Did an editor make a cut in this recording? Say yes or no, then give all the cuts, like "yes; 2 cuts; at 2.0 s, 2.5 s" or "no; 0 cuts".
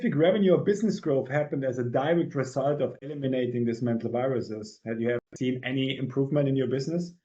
yes; 1 cut; at 5.3 s